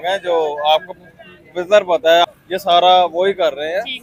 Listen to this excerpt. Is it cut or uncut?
uncut